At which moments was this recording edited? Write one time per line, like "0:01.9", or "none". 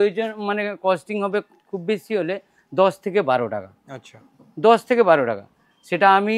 none